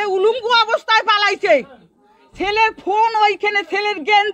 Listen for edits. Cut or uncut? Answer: uncut